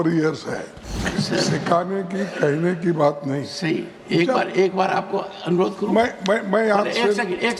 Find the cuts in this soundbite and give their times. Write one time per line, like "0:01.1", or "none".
0:01.0